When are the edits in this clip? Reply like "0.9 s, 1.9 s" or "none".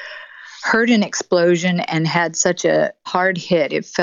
3.1 s